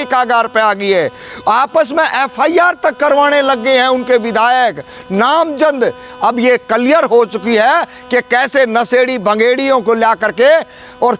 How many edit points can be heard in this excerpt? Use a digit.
0